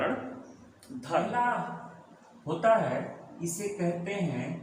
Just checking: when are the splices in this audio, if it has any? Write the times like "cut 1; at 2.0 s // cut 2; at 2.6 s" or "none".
cut 1; at 1.2 s